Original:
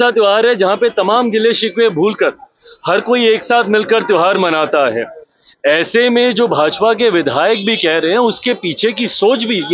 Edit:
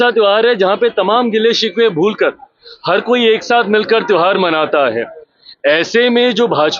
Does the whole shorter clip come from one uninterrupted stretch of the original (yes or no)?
yes